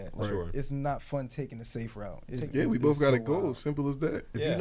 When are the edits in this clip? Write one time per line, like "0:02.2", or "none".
0:02.2